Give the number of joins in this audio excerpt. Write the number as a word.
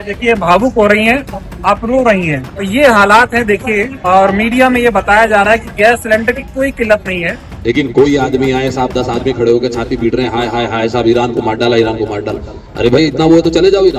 three